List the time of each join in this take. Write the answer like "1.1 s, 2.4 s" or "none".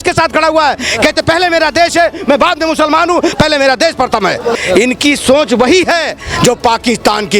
4.5 s